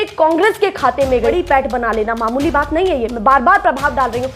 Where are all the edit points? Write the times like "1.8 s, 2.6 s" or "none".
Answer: 1.3 s